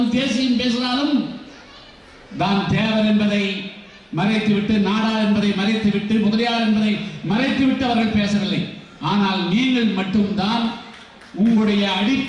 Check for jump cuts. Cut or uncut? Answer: uncut